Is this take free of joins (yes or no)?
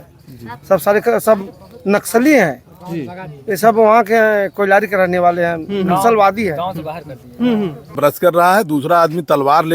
no